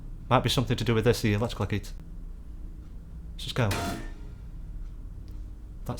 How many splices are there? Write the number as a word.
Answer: one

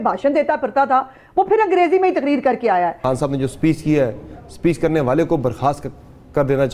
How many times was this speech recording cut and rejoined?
one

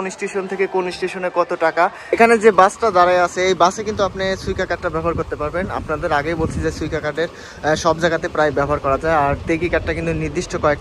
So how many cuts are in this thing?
one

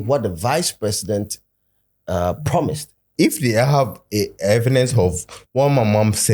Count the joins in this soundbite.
one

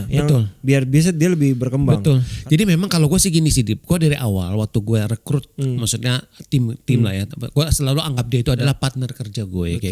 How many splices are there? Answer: two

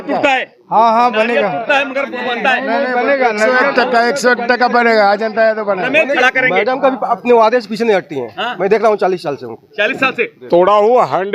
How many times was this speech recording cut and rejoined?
two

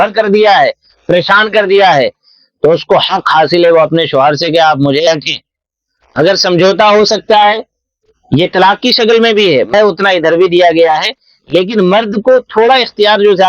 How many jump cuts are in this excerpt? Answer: two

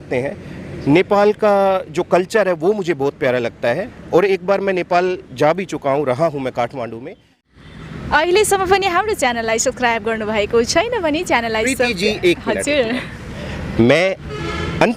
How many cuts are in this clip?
one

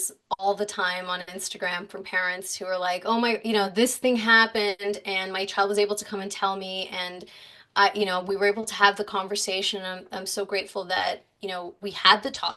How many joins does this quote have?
zero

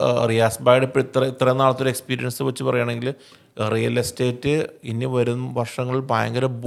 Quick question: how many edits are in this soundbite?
zero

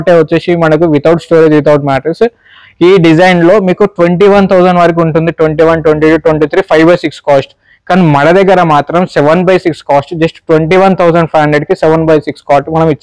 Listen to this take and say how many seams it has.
zero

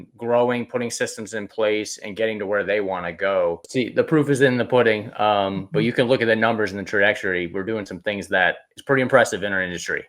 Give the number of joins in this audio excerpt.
one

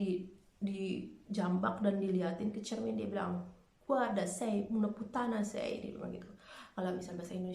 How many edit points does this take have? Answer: zero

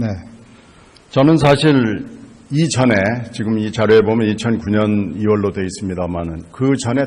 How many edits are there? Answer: zero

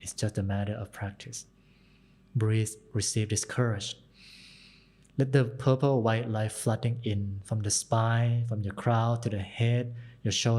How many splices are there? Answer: zero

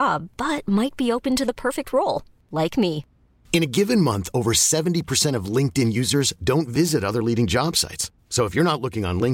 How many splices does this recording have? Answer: zero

